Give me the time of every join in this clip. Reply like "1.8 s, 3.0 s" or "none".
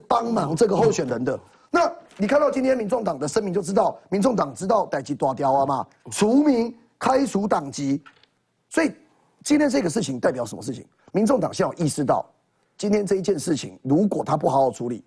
none

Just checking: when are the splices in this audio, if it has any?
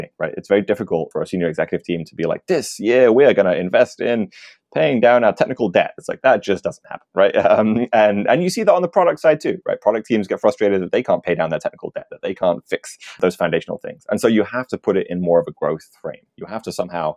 1.1 s, 13.2 s

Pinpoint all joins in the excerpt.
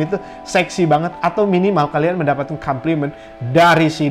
none

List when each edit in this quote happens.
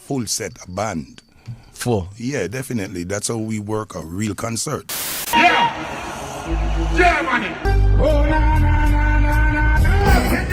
4.9 s

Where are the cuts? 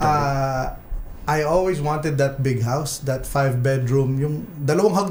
none

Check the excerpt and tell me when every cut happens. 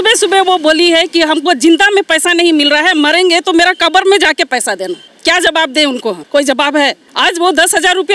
5.1 s, 6.2 s, 7.0 s

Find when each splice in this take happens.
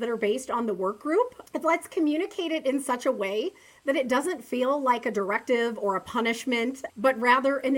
1.4 s, 6.8 s

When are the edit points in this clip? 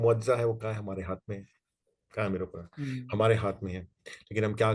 none

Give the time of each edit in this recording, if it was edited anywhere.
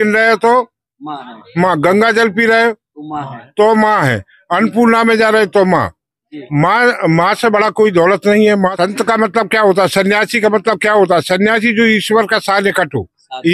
8.7 s

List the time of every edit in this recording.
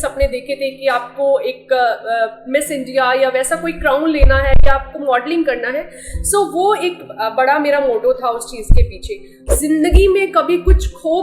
9.4 s

